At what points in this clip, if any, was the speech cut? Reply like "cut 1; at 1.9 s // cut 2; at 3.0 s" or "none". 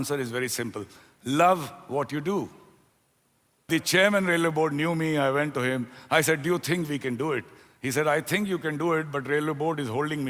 cut 1; at 3.7 s